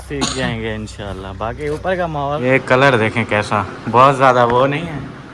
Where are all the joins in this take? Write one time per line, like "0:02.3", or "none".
0:02.4